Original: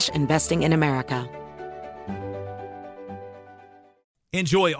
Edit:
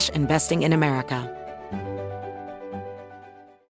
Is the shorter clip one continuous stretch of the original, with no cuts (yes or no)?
no